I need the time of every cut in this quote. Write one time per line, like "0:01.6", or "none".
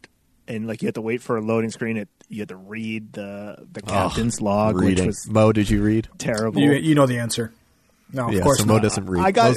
none

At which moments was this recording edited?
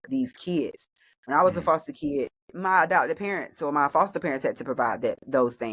0:02.4

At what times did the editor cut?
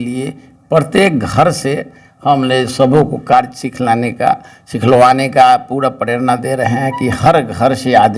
none

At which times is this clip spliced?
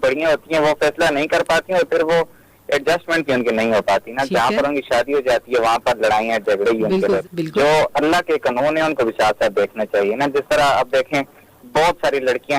0:07.2

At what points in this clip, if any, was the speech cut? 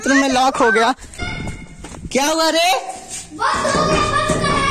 0:01.1

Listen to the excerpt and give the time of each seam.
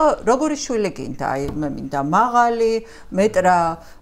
none

